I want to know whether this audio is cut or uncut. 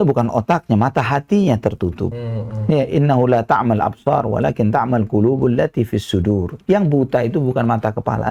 uncut